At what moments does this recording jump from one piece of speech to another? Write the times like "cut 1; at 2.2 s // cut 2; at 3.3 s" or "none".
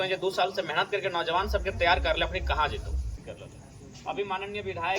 cut 1; at 3.1 s